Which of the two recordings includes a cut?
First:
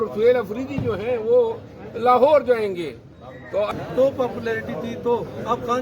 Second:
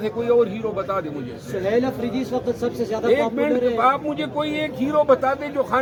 first; 1 cut; at 3.7 s

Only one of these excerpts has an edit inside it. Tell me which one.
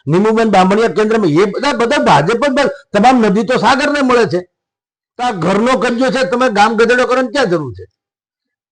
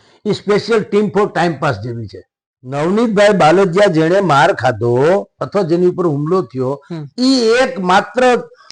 second; 1 cut; at 2.7 s

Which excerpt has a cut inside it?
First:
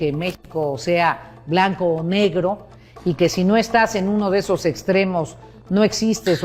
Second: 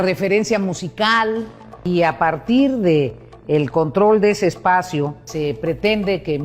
second; 2 cuts; at 1.8 s, 5.3 s

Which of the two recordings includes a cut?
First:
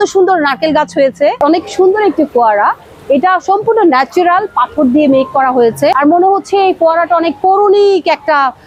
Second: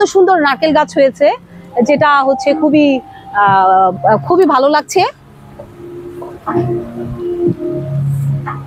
first; 2 cuts; at 1.4 s, 6.0 s

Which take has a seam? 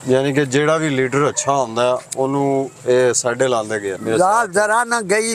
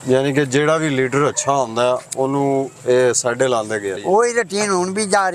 first; 1 cut; at 3.9 s

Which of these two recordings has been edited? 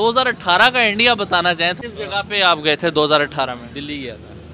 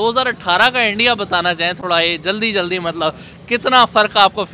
first; 1 cut; at 1.8 s

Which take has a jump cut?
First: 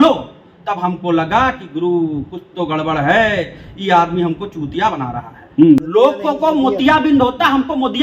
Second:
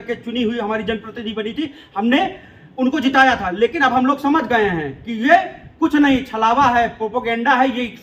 first; 1 cut; at 5.8 s

